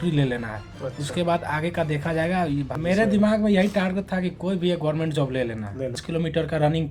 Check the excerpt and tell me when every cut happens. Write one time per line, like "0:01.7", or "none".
0:02.7
0:06.0